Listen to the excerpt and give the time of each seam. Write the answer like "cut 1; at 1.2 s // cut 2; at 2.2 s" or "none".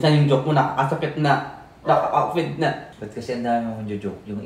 cut 1; at 2.9 s